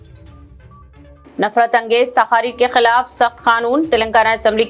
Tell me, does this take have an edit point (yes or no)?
no